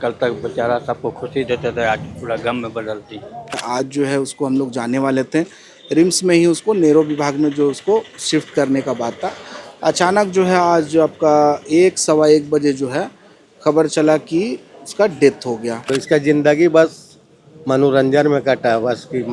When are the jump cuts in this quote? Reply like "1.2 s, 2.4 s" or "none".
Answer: 3.6 s, 15.9 s